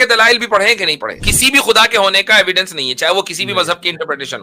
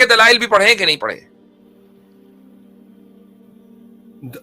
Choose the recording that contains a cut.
first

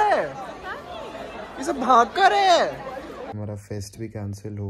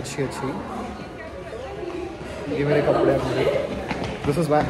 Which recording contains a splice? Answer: first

